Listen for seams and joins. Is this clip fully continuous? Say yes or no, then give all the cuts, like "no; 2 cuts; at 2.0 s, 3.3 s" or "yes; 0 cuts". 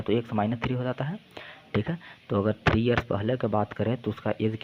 yes; 0 cuts